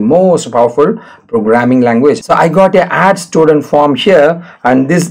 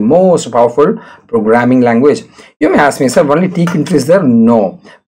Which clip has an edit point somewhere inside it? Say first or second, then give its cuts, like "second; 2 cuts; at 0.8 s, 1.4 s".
first; 1 cut; at 2.2 s